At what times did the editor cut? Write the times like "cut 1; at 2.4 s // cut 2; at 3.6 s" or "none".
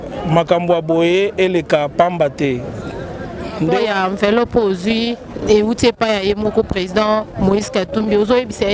cut 1; at 3.7 s